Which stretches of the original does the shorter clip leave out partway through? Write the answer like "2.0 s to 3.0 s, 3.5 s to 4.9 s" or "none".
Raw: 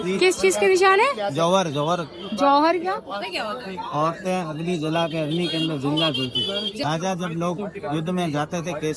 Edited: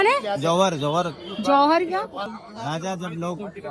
3.3 s to 6.5 s